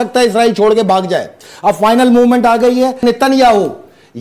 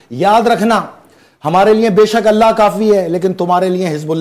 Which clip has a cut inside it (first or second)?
first